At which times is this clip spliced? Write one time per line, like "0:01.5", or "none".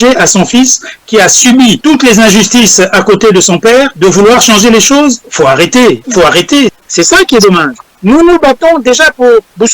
0:01.8
0:03.9
0:05.2
0:06.3